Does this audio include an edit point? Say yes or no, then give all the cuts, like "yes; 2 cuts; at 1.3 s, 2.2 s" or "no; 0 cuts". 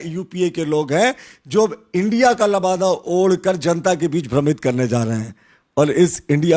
no; 0 cuts